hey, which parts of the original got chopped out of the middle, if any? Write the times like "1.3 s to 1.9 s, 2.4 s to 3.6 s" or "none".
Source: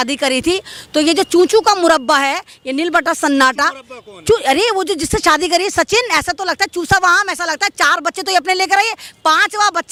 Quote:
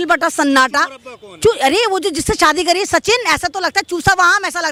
none